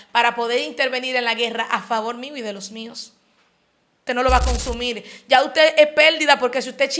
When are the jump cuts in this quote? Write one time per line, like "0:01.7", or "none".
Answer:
0:04.0